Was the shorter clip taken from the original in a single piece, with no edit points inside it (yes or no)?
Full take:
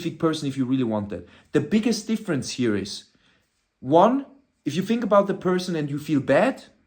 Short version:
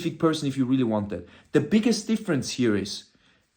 yes